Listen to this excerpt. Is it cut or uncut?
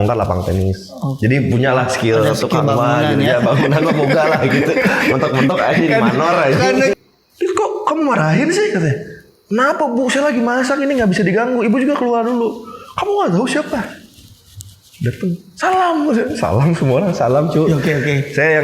cut